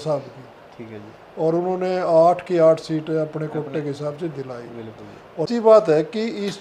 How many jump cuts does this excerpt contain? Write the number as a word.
one